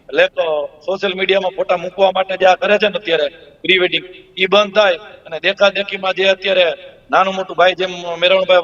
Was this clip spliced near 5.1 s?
no; 0 cuts

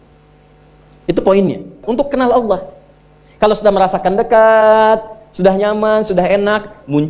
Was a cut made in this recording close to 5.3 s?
no; 1 cut; at 1.8 s

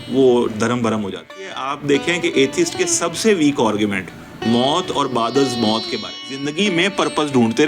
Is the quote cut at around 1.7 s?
yes; 2 cuts; at 1.7 s, 6.5 s

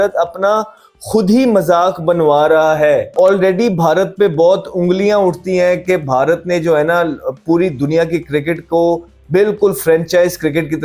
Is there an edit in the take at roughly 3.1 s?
yes; 1 cut; at 3.1 s

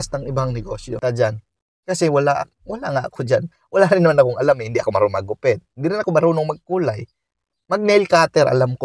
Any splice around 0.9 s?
yes; 1 cut; at 0.9 s

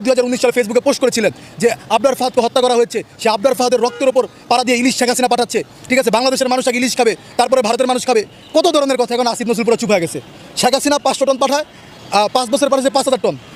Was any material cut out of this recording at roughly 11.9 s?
no; 0 cuts

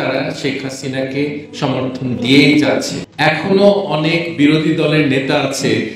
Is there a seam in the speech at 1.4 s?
no; 1 cut; at 3.0 s

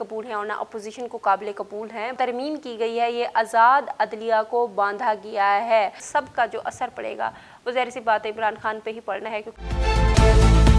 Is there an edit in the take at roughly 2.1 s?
yes; 3 cuts; at 2.1 s, 6.0 s, 9.5 s

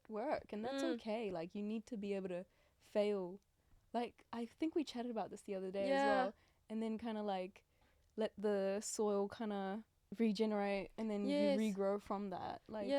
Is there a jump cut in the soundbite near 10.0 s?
yes; 1 cut; at 10.0 s

